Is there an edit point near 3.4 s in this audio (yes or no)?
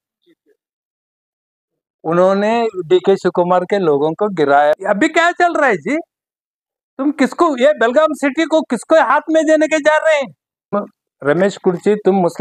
no